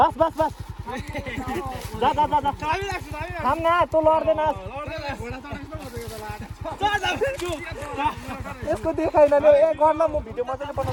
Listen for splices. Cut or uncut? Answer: uncut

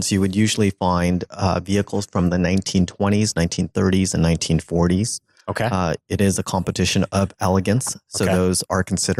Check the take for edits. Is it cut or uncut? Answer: uncut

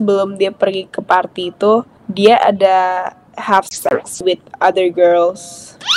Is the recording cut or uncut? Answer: uncut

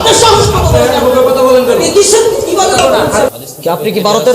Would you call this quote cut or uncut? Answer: cut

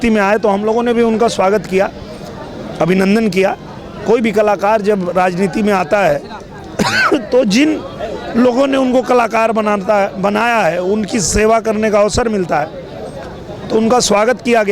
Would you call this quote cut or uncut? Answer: uncut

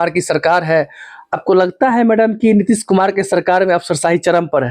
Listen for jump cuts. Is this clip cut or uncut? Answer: uncut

